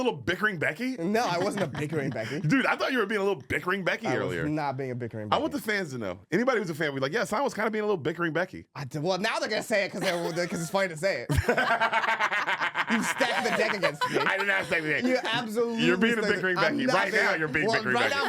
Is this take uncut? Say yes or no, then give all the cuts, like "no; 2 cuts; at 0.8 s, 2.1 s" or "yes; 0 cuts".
yes; 0 cuts